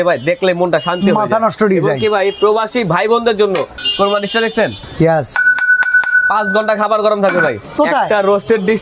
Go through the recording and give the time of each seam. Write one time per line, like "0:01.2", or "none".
0:03.8
0:04.8
0:07.7